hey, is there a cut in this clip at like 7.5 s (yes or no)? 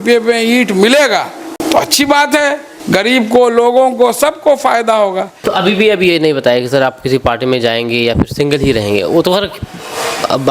no